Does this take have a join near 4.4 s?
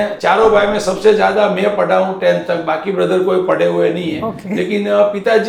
no; 0 cuts

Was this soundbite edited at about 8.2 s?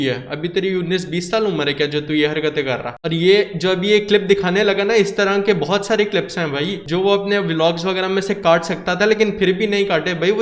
no; 2 cuts; at 2.9 s, 6.8 s

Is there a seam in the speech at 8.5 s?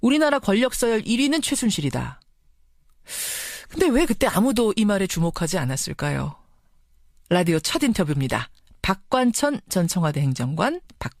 yes; 1 cut; at 8.5 s

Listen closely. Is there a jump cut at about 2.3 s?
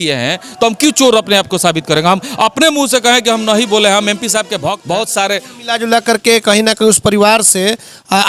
no; 1 cut; at 4.8 s

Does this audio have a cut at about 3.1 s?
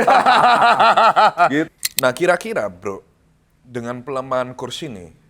no; 1 cut; at 1.7 s

